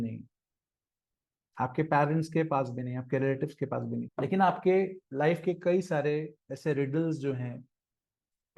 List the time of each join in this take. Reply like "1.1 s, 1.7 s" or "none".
4.1 s